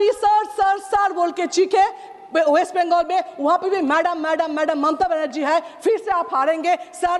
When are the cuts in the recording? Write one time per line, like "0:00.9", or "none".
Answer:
none